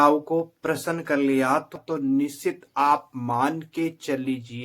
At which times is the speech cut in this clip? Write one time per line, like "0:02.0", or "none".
0:01.8